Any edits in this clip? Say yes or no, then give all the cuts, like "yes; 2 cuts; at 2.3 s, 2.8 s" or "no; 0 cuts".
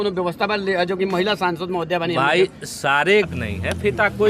yes; 1 cut; at 3.3 s